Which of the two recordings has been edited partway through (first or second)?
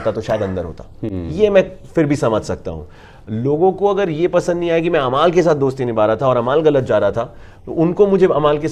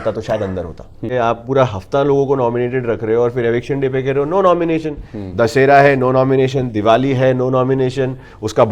second